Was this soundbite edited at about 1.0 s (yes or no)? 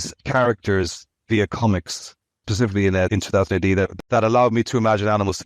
no